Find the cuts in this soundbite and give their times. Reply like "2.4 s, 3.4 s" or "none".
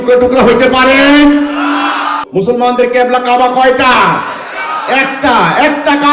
2.1 s